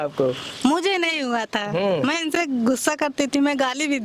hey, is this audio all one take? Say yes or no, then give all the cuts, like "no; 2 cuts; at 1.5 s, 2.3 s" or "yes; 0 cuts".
yes; 0 cuts